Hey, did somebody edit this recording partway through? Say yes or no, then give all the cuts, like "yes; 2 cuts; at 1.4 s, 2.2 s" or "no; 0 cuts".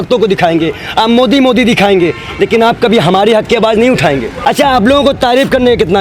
yes; 1 cut; at 4.3 s